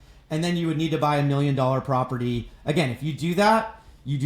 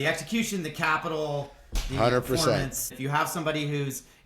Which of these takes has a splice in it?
second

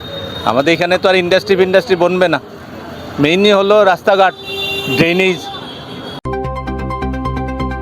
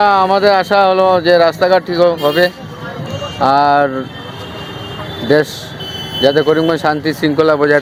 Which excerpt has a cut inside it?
first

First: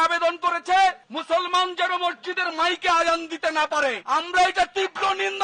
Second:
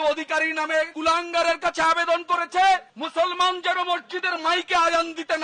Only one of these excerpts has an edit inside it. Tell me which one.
second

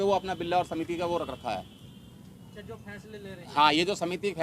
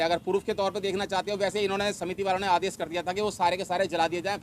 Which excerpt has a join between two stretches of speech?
first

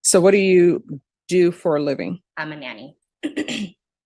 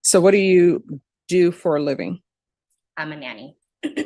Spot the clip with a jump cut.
first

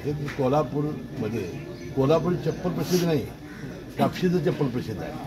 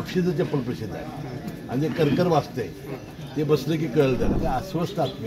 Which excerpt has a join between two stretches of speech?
second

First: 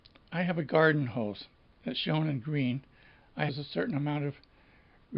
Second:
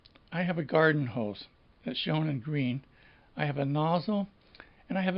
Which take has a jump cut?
second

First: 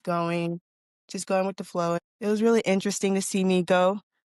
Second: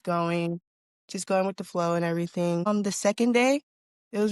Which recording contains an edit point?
first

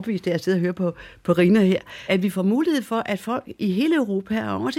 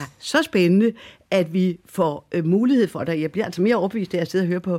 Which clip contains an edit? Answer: first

